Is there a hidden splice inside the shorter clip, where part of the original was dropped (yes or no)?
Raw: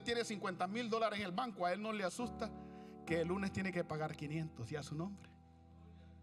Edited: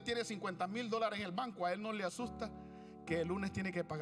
no